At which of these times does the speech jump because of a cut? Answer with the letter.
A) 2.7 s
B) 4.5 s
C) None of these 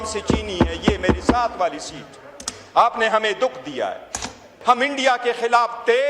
B